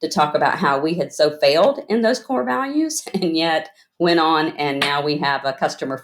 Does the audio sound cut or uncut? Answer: uncut